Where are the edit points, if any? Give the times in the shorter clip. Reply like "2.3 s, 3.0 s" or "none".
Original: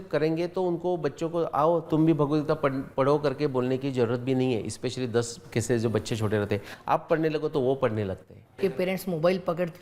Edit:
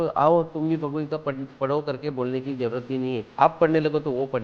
3.3 s